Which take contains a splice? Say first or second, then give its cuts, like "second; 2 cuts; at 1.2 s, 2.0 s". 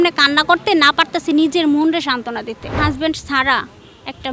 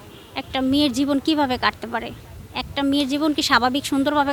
first; 1 cut; at 2.6 s